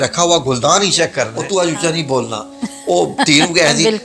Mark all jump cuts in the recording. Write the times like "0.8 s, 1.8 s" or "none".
1.4 s